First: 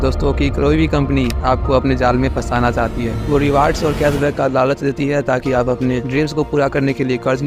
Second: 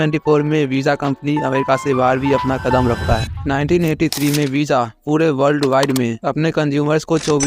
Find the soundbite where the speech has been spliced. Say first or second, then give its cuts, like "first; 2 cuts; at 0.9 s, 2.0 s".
second; 1 cut; at 3.3 s